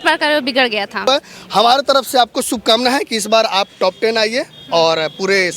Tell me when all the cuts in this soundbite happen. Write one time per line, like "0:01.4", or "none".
0:01.1